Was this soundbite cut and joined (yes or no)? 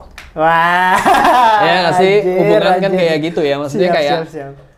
no